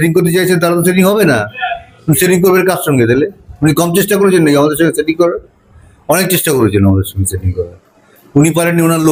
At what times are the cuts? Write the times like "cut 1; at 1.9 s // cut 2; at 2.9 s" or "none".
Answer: none